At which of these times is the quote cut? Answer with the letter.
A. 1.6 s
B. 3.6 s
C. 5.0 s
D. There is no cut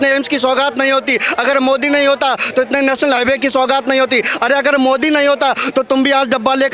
D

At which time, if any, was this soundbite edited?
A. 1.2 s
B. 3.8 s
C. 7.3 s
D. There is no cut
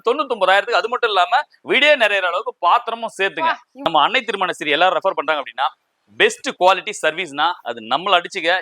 B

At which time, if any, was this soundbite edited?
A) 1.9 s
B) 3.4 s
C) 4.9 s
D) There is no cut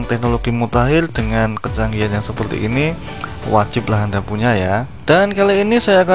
C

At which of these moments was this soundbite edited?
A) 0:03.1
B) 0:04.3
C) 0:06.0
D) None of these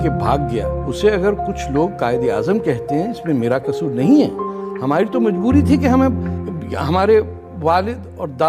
D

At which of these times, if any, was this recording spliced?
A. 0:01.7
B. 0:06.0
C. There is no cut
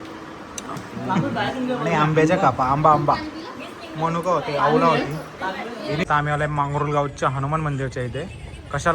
B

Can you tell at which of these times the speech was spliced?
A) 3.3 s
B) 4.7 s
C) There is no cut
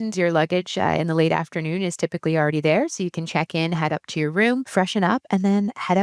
B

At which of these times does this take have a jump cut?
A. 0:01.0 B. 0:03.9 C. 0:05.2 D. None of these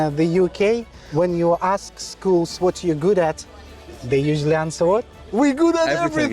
A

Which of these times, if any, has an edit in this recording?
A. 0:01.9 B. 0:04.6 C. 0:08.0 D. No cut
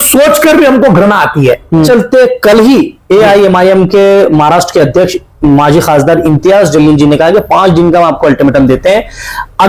A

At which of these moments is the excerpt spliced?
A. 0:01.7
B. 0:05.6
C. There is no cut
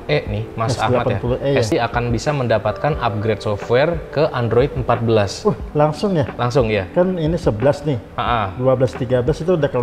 A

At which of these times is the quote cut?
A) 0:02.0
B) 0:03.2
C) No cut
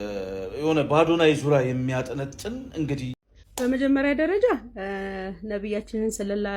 B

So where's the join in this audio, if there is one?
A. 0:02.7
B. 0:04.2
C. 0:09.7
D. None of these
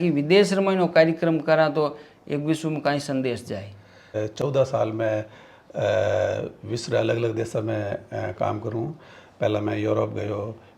B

